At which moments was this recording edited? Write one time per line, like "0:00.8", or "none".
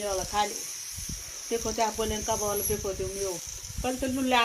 0:03.5